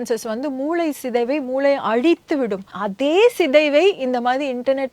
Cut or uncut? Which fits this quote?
cut